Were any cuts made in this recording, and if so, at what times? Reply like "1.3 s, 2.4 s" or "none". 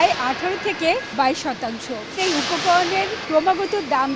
1.1 s, 2.2 s, 3.2 s

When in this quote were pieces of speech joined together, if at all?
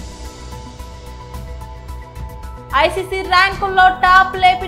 0.7 s, 2.2 s

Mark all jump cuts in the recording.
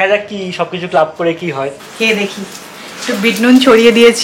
1.8 s

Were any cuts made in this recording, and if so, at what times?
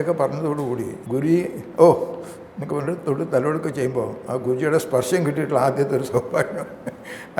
1.0 s

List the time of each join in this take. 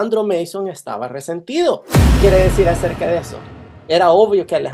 2.2 s

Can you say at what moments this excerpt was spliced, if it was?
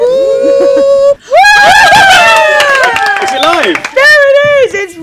1.2 s

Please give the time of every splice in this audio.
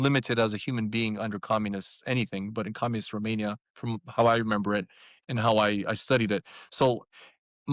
none

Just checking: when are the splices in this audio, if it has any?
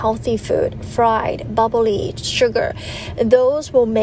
none

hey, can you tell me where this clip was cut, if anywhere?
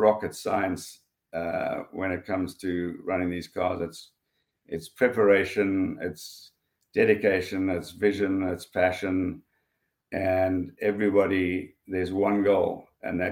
none

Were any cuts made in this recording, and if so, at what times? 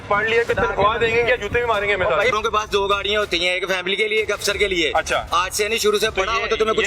2.3 s

